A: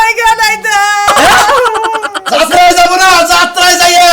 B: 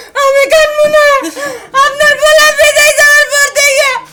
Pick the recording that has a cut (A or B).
A